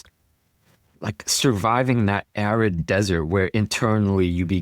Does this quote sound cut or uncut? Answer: uncut